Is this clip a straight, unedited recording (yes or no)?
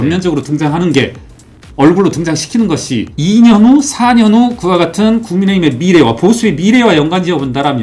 no